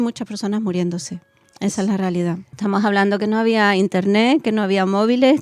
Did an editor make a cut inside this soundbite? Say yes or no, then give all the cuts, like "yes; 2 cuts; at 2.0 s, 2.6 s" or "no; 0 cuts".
yes; 1 cut; at 2.5 s